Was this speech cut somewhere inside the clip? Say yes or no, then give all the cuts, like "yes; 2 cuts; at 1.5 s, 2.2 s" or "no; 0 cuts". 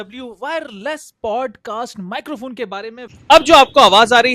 yes; 1 cut; at 3.1 s